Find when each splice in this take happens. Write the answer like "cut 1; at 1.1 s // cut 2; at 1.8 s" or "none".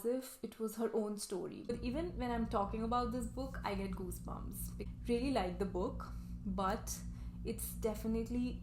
cut 1; at 1.7 s // cut 2; at 4.8 s